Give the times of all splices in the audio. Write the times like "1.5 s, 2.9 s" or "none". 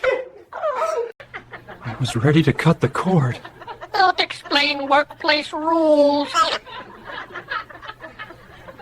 1.3 s